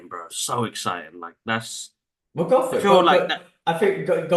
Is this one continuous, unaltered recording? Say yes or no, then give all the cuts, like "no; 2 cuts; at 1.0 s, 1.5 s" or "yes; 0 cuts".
yes; 0 cuts